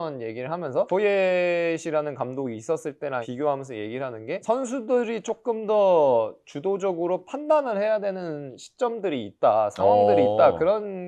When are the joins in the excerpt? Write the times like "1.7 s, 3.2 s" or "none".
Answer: 0.9 s, 3.3 s, 4.4 s